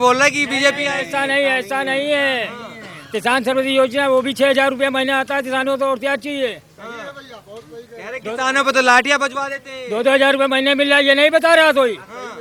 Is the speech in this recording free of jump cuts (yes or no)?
yes